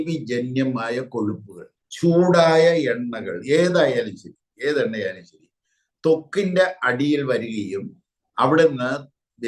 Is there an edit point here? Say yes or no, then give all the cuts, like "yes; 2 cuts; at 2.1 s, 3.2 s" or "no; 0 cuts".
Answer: no; 0 cuts